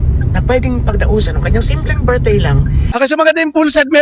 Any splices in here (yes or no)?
yes